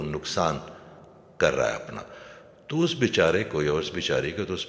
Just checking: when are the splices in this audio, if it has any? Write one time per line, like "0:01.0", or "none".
none